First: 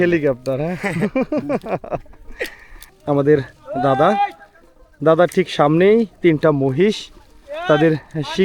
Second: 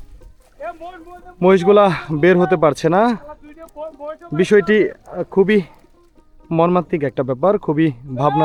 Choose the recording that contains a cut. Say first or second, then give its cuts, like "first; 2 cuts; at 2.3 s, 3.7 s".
first; 1 cut; at 2.9 s